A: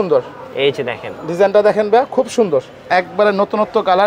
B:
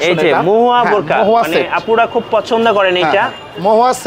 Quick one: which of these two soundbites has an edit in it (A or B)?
A